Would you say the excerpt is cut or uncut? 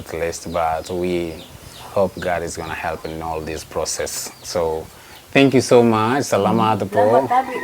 uncut